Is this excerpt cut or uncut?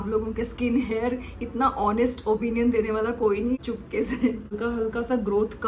cut